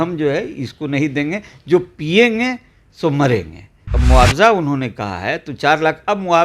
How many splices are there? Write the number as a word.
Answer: one